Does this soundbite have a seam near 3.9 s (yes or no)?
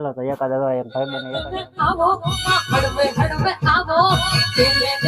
no